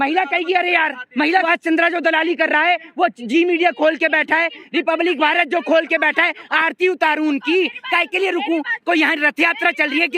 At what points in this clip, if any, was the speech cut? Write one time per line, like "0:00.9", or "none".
0:01.5